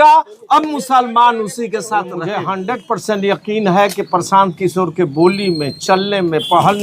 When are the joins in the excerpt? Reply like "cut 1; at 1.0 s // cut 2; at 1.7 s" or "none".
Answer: cut 1; at 2.2 s